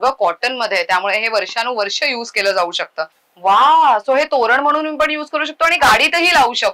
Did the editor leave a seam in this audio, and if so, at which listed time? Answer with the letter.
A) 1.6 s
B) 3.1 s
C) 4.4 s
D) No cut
B